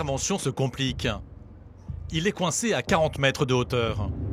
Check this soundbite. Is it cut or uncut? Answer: uncut